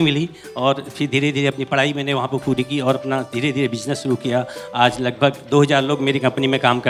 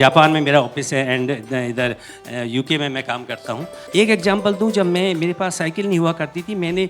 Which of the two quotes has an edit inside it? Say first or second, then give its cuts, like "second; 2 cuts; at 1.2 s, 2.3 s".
second; 1 cut; at 3.7 s